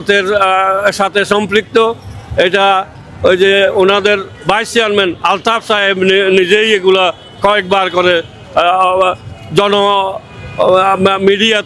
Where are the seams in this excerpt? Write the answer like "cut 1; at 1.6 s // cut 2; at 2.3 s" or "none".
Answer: none